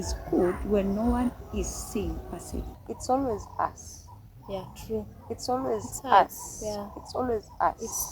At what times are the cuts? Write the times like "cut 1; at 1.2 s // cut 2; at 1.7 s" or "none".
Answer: cut 1; at 2.7 s